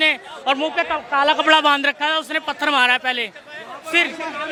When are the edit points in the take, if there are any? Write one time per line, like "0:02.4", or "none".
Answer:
none